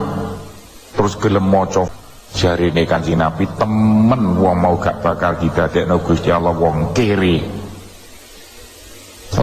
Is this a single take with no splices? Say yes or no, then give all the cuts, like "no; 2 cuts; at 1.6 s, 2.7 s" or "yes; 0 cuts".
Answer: no; 1 cut; at 1.9 s